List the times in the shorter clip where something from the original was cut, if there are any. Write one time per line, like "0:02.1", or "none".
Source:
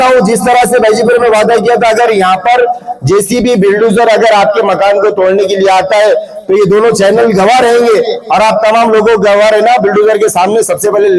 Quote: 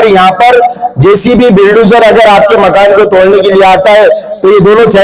none